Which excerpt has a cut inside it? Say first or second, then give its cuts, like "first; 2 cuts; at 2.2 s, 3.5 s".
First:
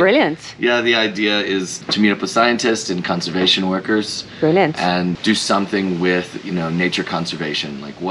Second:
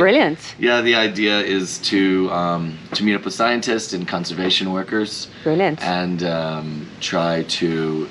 first; 2 cuts; at 1.8 s, 5.1 s